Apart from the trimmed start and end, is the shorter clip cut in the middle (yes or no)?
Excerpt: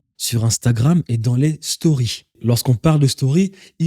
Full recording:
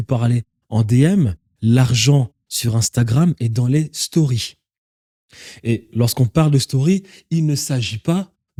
yes